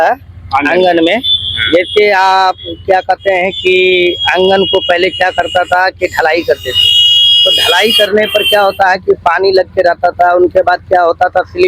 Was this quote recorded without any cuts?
yes; 0 cuts

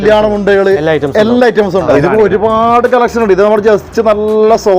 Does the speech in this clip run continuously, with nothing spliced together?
no; 1 cut; at 1.9 s

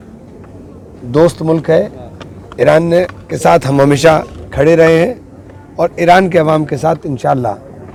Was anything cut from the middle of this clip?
no; 0 cuts

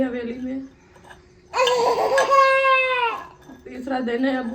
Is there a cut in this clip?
yes; 1 cut; at 3.1 s

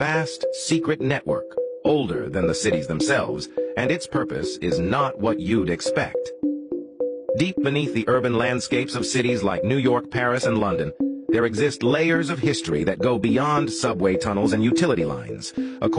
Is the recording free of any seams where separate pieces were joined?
yes; 0 cuts

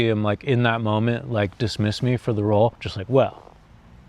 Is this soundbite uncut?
no; 1 cut; at 2.9 s

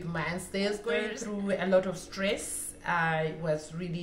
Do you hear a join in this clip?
yes; 1 cut; at 1.2 s

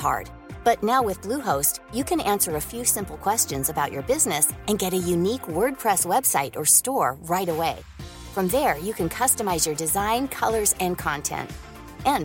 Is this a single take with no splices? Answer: yes; 0 cuts

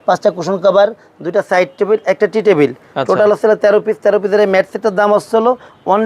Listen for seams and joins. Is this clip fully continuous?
yes; 0 cuts

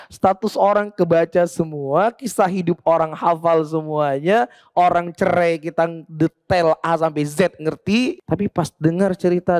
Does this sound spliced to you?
yes; 1 cut; at 8.2 s

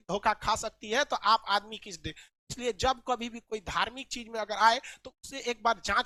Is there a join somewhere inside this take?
no; 0 cuts

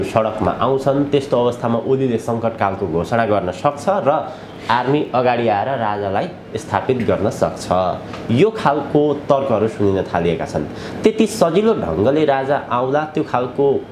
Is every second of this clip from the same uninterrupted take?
yes; 0 cuts

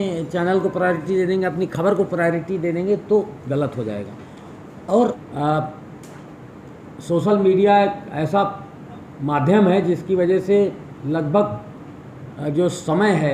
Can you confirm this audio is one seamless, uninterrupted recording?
no; 1 cut; at 5.2 s

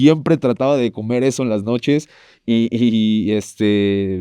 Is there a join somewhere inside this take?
no; 0 cuts

